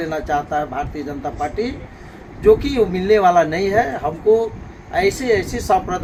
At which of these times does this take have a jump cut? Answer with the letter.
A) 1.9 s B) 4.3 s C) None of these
C